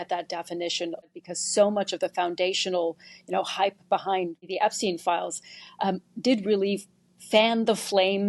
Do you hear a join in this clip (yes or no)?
yes